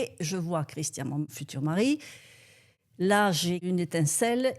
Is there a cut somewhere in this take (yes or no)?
yes